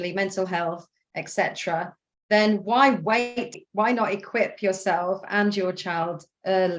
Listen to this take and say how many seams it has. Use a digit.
1